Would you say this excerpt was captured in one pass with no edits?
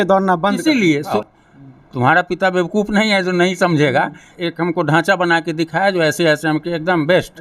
no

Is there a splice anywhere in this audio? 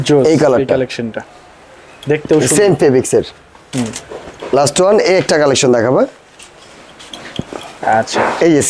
no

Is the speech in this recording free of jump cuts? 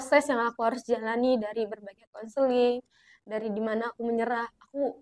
yes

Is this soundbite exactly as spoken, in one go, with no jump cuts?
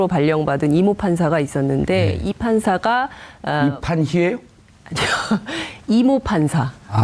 yes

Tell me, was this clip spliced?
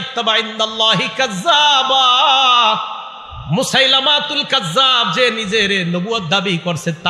no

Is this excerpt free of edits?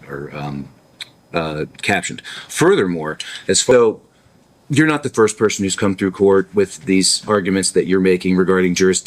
no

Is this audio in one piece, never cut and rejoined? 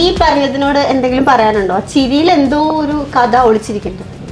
yes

